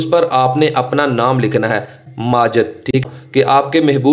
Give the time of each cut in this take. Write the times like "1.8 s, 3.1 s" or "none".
2.0 s, 3.0 s